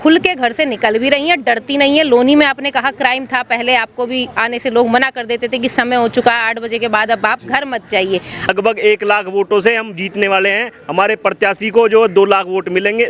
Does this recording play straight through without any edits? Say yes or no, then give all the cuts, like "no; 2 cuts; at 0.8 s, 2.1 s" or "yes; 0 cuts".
no; 1 cut; at 8.5 s